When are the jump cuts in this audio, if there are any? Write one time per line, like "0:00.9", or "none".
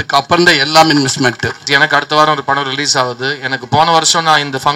0:01.7

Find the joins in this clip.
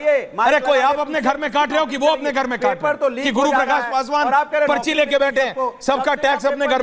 none

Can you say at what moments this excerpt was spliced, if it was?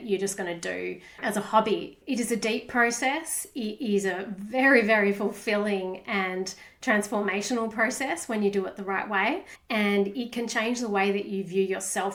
none

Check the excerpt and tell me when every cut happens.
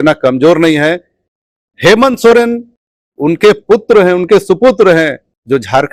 none

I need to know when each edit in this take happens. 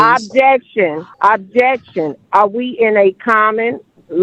0:01.1

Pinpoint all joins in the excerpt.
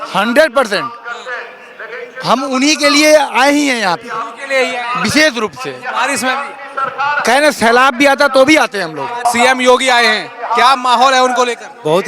0:09.2

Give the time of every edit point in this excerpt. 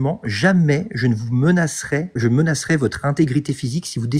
0:02.2

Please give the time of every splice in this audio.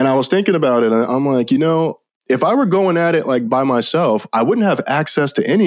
0:01.1
0:03.5

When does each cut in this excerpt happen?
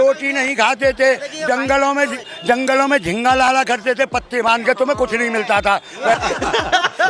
0:06.2

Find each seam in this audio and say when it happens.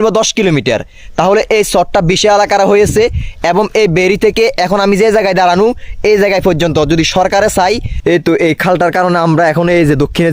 0:08.0

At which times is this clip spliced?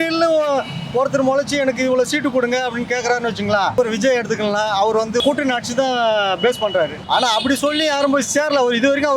0:03.7
0:05.2
0:07.0

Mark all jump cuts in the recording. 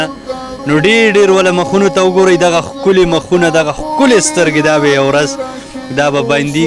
none

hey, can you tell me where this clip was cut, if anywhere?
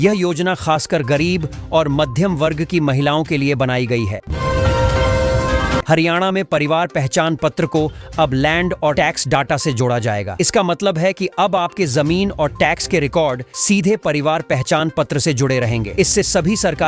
0:04.2
0:05.8

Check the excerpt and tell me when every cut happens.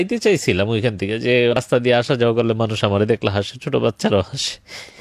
0:01.5

